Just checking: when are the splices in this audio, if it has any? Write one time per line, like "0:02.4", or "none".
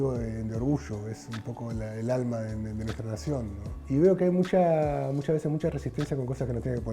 0:03.8

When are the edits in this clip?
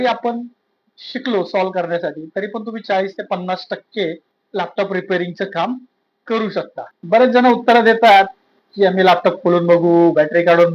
0:06.9

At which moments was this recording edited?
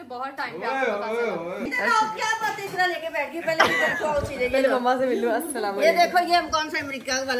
none

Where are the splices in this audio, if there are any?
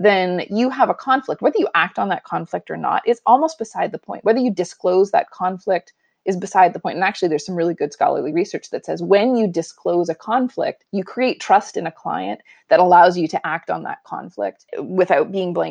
0:10.8

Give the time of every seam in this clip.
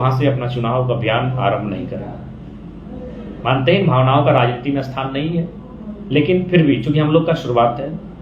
none

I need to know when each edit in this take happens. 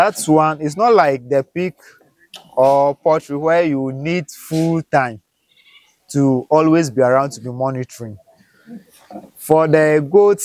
none

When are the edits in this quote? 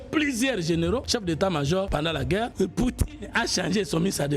0:01.0
0:02.0

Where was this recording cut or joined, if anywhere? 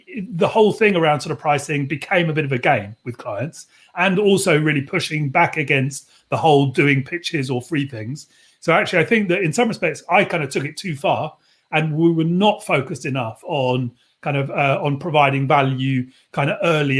none

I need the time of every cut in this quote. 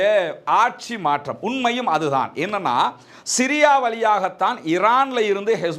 none

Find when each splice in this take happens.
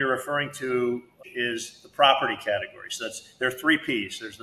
0:01.1

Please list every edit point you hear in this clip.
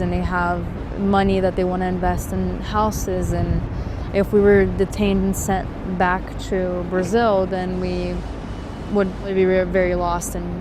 0:09.3

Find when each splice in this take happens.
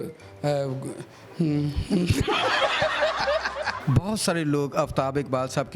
0:03.8

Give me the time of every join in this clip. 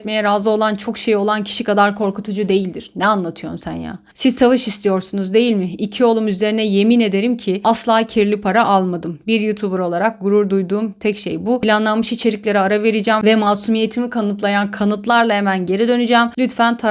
none

